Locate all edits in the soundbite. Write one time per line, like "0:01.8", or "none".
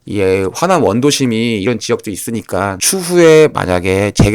0:01.6
0:02.8